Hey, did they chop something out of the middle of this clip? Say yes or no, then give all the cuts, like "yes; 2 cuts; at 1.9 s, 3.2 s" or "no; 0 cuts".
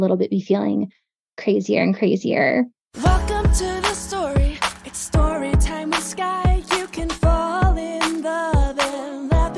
yes; 1 cut; at 2.8 s